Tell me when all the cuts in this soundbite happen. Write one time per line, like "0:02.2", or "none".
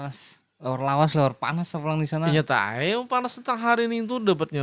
none